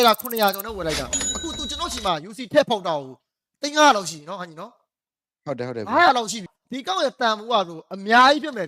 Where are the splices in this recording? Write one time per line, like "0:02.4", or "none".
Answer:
0:06.4